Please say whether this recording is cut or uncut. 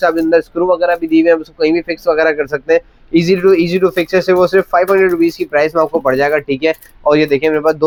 uncut